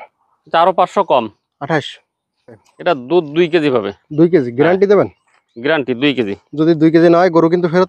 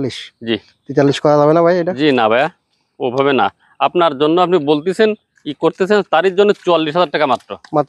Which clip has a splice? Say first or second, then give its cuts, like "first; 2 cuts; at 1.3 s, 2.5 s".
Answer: first; 1 cut; at 2.7 s